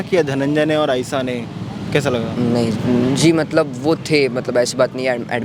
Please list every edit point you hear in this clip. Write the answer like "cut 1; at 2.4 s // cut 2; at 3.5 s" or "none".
none